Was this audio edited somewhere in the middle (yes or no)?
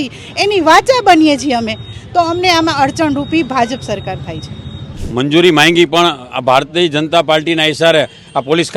yes